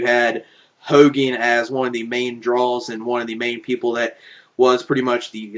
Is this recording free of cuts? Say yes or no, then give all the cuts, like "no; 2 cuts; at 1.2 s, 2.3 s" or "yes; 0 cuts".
yes; 0 cuts